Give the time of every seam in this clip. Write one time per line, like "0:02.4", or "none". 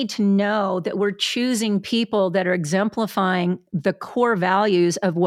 none